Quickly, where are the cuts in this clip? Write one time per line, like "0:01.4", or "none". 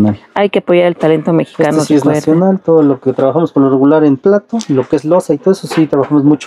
none